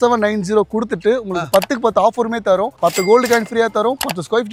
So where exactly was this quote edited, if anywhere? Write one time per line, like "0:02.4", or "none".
none